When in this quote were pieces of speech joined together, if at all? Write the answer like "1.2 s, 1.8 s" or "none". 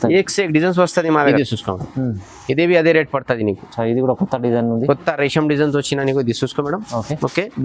1.3 s